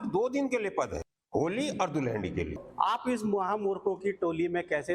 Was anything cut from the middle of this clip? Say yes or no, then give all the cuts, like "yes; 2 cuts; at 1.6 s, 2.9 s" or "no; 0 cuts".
yes; 2 cuts; at 1.1 s, 2.6 s